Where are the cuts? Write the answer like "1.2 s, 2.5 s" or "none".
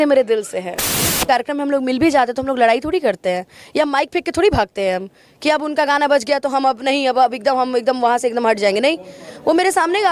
1.2 s